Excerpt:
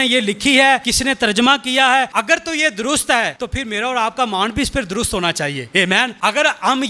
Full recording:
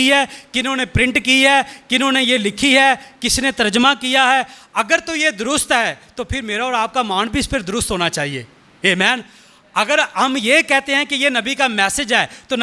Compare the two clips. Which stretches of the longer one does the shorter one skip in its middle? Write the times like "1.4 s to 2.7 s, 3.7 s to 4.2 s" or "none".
3.1 s to 3.3 s, 4.5 s to 4.7 s, 6.0 s to 6.2 s, 8.6 s to 9.4 s